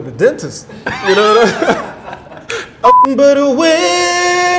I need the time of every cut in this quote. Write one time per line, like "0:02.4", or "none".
0:02.9